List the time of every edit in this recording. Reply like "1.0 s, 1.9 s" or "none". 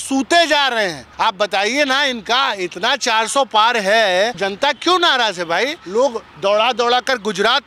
1.0 s, 4.4 s, 5.8 s